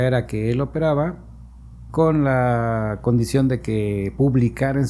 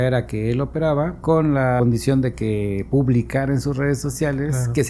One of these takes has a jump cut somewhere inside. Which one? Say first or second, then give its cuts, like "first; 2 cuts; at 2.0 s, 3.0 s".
second; 1 cut; at 1.7 s